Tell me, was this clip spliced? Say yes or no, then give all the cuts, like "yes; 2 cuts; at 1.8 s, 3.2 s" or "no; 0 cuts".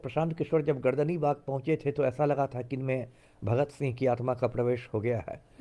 no; 0 cuts